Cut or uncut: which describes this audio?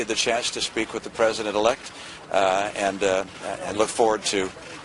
uncut